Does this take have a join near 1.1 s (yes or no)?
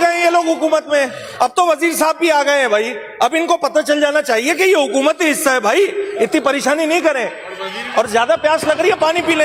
no